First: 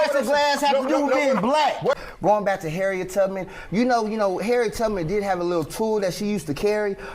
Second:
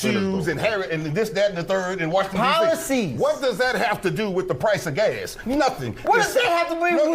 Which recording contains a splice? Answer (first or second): first